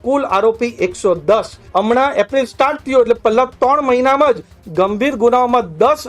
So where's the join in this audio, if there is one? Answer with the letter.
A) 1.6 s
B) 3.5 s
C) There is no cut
A